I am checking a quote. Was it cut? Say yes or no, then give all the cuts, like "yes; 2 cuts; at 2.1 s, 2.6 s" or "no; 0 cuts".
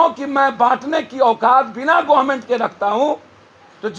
no; 0 cuts